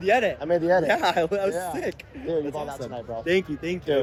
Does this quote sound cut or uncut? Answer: uncut